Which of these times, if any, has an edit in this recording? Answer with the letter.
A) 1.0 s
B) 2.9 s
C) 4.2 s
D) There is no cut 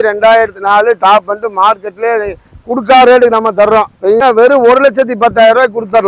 C